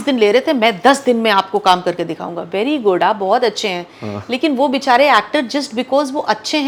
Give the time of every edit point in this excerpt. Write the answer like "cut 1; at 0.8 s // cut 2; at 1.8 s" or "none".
none